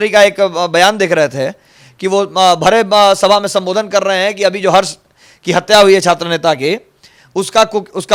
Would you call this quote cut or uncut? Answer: uncut